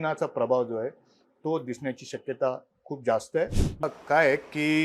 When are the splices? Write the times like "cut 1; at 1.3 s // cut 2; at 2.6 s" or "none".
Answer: cut 1; at 3.8 s